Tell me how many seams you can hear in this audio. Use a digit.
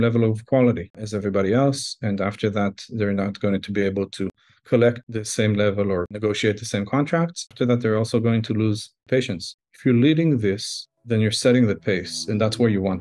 0